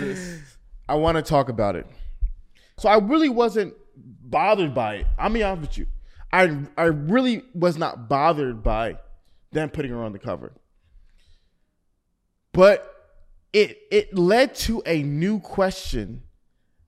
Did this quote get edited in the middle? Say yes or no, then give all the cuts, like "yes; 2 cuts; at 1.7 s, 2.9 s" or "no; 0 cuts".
yes; 1 cut; at 2.8 s